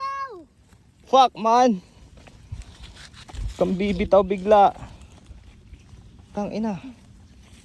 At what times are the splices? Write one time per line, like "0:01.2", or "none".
none